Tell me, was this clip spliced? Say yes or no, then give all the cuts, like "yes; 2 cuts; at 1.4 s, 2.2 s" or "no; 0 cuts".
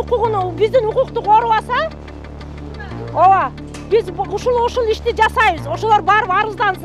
no; 0 cuts